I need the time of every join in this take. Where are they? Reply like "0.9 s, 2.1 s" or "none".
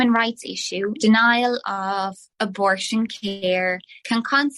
0.9 s